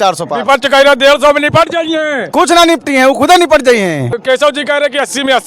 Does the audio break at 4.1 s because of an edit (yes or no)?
yes